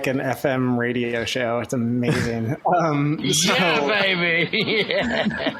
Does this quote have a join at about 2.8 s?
no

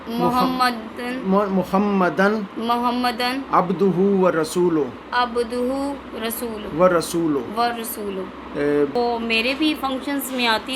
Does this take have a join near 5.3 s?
no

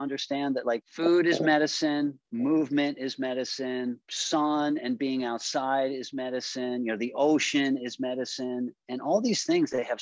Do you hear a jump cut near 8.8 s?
no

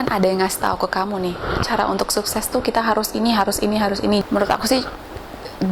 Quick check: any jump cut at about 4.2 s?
yes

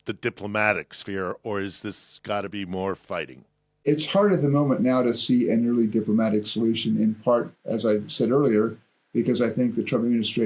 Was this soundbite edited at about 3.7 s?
yes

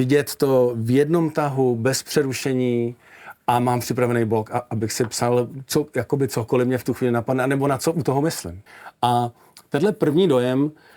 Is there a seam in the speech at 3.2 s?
no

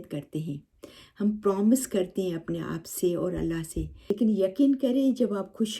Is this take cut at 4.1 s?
yes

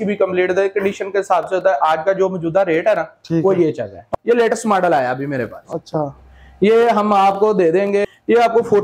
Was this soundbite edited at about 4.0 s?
yes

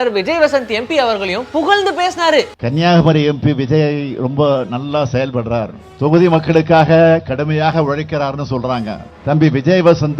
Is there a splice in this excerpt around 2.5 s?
yes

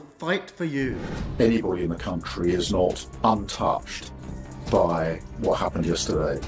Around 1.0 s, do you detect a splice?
yes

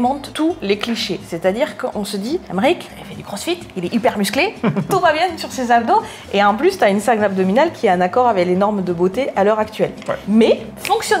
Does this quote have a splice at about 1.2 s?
no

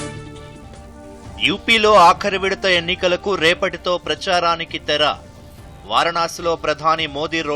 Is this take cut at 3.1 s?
no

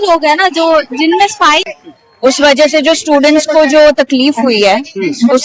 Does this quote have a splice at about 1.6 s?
yes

